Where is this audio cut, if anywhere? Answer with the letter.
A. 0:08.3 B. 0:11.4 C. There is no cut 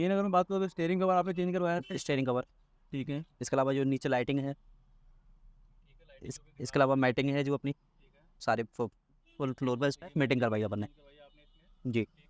A